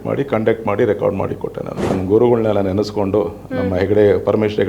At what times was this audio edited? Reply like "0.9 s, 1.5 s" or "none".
1.9 s